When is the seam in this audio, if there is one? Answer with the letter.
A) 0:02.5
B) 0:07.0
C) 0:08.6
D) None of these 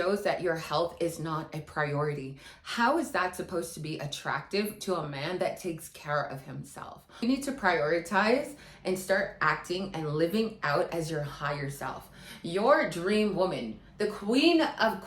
B